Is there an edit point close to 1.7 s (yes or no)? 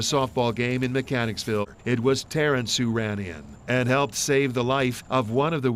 yes